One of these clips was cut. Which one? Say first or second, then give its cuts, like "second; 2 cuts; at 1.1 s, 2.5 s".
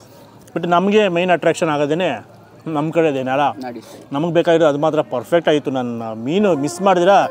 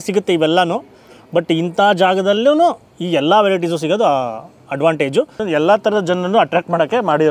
second; 1 cut; at 5.4 s